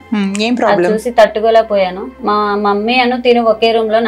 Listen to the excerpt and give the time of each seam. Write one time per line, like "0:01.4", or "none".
0:02.1